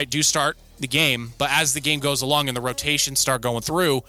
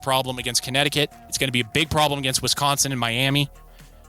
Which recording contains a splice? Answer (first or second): second